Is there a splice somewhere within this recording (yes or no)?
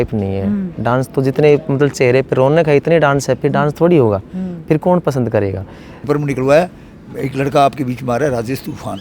yes